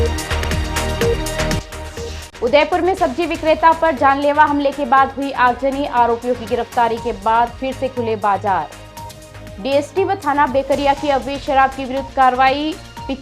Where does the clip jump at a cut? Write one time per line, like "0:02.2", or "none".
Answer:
0:01.5